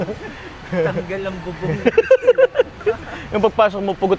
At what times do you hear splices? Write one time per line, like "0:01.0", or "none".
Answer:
0:02.8